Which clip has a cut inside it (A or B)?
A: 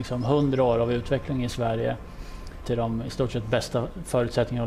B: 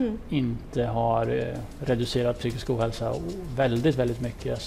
A